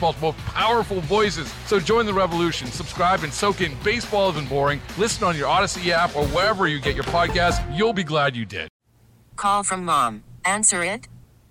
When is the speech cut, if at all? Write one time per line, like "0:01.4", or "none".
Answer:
0:08.8